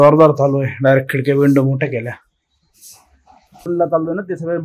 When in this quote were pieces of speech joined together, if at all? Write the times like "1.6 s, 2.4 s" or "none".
3.7 s